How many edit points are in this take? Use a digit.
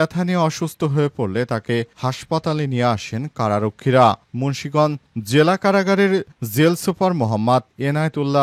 0